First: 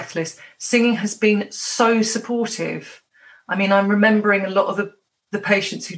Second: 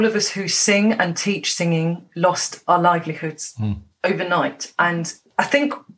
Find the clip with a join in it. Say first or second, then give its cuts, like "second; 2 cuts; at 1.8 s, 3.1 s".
second; 1 cut; at 5.0 s